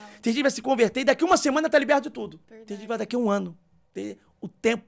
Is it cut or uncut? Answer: uncut